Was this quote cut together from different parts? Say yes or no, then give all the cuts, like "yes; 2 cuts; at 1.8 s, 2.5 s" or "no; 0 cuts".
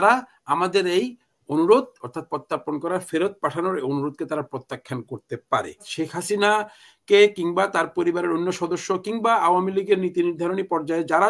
yes; 1 cut; at 5.9 s